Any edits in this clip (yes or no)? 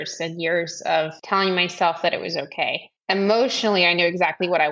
yes